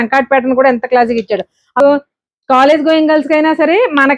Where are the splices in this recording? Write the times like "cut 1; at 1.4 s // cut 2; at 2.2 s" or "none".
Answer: cut 1; at 1.8 s